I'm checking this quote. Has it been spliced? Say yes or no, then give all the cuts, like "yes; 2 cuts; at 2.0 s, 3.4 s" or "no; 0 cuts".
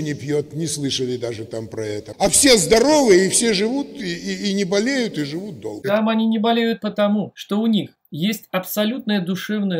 yes; 4 cuts; at 2.1 s, 5.7 s, 7.4 s, 8.0 s